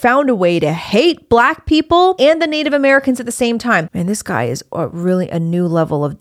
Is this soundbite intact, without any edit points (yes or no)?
no